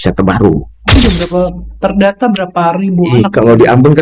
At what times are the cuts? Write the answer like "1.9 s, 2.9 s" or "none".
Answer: 1.0 s